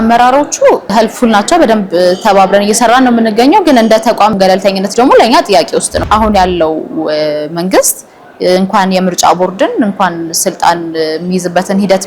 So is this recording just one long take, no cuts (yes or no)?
no